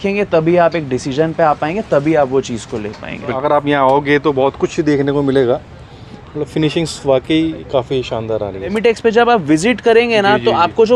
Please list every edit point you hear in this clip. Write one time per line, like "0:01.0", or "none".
0:03.4
0:08.7